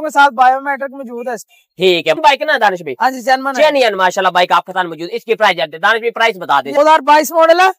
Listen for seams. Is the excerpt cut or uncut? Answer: cut